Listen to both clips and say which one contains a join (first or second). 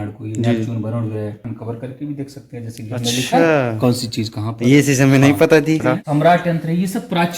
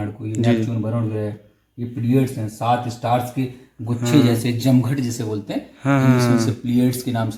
first